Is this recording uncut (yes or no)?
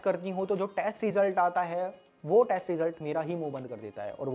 yes